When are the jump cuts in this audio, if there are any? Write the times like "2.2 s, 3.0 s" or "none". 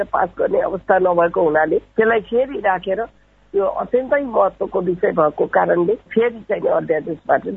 1.9 s